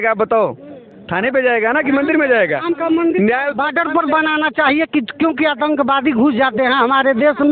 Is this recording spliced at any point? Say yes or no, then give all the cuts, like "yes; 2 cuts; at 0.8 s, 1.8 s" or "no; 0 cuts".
no; 0 cuts